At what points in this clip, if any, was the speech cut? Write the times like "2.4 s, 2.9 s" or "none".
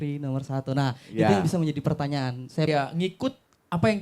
2.7 s